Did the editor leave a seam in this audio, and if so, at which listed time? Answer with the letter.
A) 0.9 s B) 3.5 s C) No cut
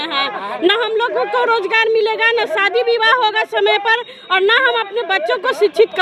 C